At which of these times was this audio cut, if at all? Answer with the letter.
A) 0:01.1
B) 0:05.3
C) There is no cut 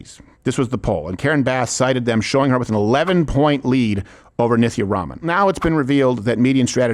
B